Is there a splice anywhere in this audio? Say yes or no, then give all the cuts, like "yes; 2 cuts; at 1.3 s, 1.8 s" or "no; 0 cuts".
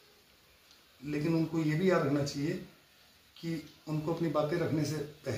no; 0 cuts